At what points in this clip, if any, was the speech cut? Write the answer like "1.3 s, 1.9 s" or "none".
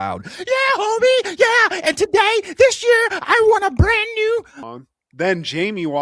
4.6 s